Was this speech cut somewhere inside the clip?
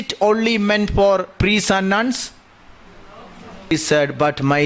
yes; 1 cut; at 3.7 s

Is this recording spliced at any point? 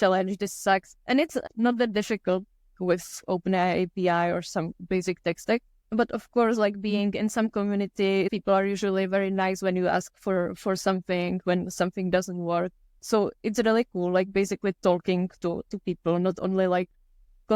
yes; 2 cuts; at 8.3 s, 12.9 s

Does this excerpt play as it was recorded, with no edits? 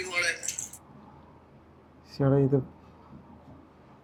yes; 0 cuts

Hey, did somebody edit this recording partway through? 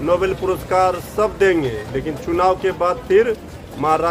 no; 0 cuts

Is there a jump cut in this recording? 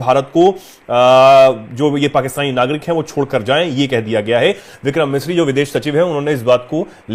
no; 0 cuts

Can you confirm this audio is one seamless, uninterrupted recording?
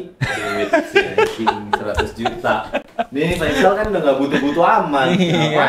yes; 0 cuts

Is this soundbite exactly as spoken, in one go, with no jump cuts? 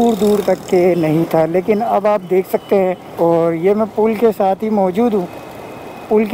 no; 1 cut; at 3.1 s

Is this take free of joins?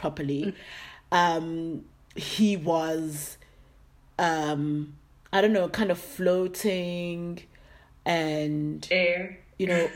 yes; 0 cuts

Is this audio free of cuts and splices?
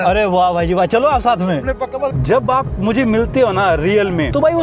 no; 1 cut; at 2.2 s

